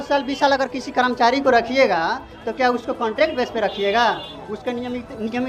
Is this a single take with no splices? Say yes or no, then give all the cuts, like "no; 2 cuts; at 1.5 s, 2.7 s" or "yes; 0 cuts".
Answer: yes; 0 cuts